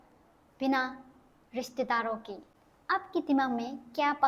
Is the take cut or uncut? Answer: cut